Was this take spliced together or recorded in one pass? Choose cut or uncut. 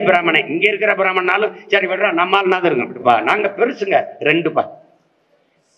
cut